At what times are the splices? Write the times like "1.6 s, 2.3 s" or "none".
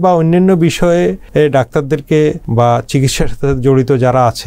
1.2 s, 2.4 s

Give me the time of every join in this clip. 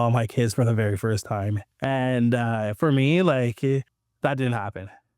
1.6 s, 4.0 s

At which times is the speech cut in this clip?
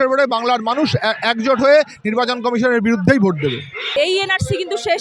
3.9 s

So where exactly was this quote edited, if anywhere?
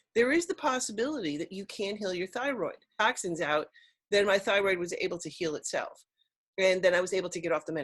2.9 s

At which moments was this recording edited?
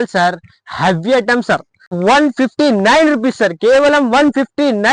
1.9 s

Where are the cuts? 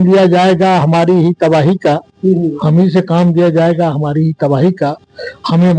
none

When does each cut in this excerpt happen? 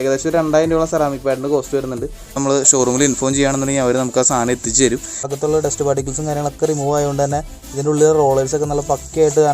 2.4 s, 5.2 s

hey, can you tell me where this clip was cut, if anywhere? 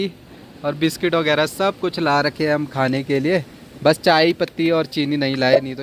none

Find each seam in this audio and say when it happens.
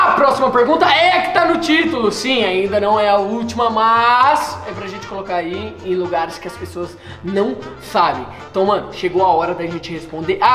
none

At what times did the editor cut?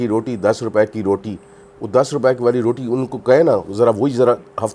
none

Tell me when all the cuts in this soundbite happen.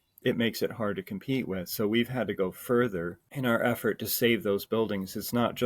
3.2 s

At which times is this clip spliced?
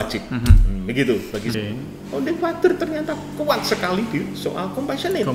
1.5 s

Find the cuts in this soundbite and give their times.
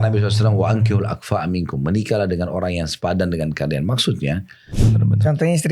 4.6 s

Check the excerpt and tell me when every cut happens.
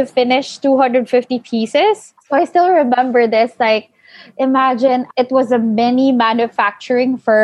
2.1 s, 5.1 s

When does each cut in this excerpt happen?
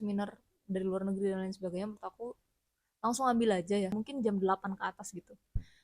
3.9 s

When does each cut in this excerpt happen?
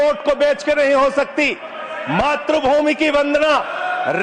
none

